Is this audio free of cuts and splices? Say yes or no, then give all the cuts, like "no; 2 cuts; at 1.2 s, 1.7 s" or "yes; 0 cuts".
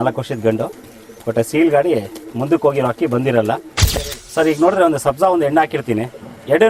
no; 1 cut; at 3.8 s